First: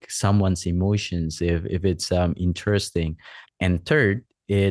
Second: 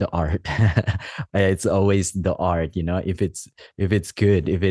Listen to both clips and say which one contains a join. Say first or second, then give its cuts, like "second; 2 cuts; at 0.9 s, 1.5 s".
first; 1 cut; at 3.5 s